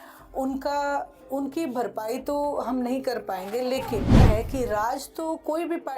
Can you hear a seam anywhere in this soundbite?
yes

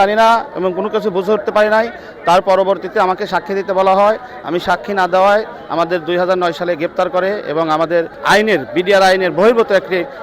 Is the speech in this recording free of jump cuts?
yes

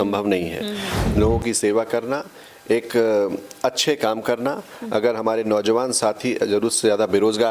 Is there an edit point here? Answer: yes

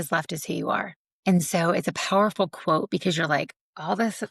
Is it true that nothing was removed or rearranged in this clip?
no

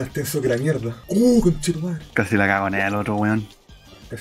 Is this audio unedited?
no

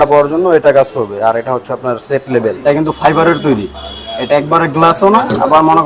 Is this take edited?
yes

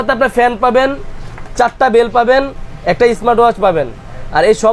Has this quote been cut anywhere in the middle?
no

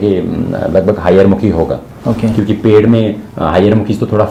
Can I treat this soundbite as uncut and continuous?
yes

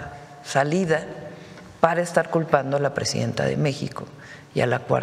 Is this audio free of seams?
yes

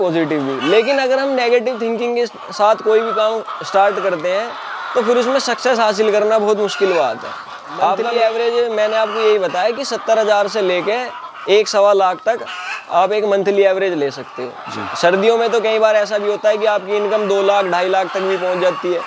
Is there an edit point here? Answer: yes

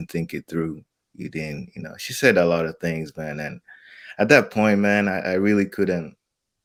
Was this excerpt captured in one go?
yes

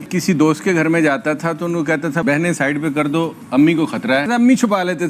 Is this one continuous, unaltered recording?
yes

